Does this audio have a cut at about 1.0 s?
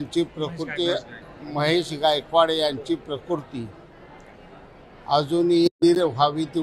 no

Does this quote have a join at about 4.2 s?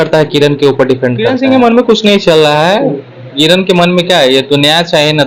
no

